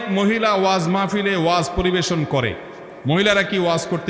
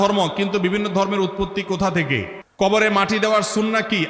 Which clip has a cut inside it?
second; 1 cut; at 2.4 s

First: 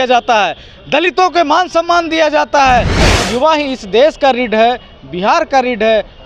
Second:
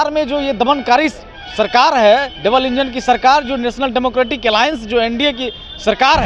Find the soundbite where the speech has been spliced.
first; 1 cut; at 3.1 s

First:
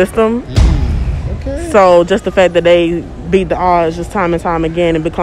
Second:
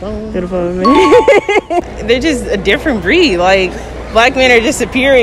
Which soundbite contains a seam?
second; 1 cut; at 1.9 s

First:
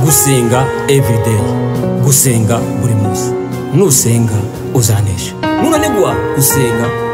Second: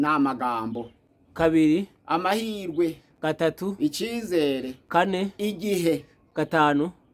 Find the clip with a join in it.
second; 1 cut; at 6.1 s

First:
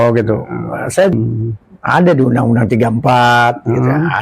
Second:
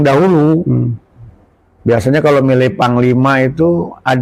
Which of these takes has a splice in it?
first; 1 cut; at 1.1 s

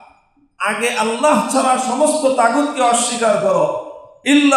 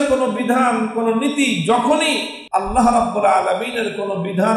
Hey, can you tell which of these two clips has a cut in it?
second; 1 cut; at 2.3 s

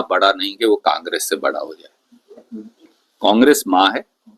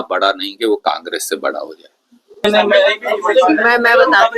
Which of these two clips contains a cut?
second; 1 cut; at 2.4 s

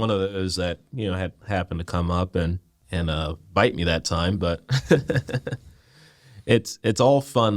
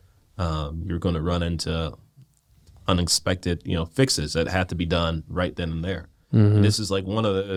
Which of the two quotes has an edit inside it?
first; 1 cut; at 2.7 s

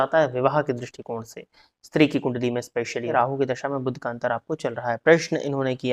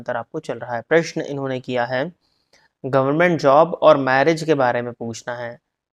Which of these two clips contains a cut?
first; 1 cut; at 3.1 s

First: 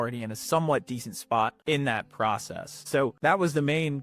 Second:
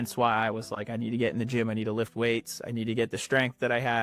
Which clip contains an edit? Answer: first; 2 cuts; at 1.6 s, 3.2 s

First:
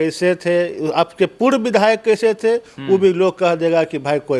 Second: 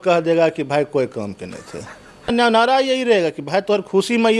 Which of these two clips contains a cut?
second; 1 cut; at 2.3 s

